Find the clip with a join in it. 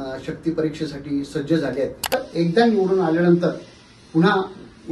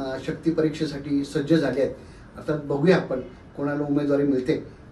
first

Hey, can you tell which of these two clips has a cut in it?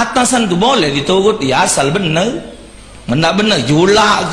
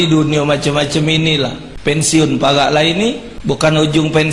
second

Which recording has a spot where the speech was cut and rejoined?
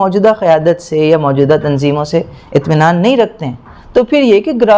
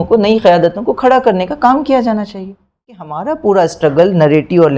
second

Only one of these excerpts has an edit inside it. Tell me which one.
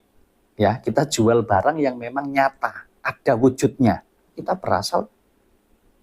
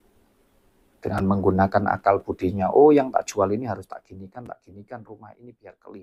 first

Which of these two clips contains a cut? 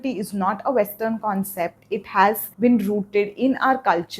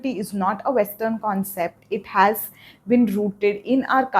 first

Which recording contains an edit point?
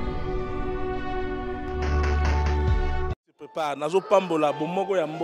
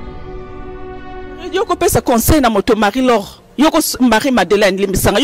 second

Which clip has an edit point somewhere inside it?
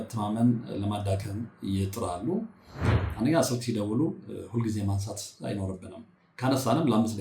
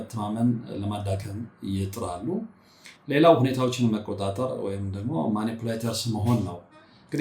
first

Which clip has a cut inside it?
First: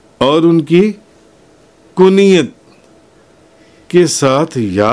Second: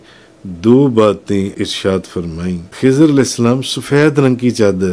second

